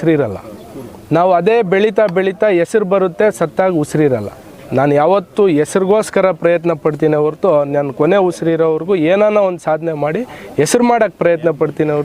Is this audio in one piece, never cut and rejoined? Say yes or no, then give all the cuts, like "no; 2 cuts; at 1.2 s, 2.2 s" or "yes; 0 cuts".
yes; 0 cuts